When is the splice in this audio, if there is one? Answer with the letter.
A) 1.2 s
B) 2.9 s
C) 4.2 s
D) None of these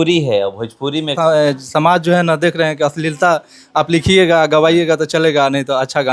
A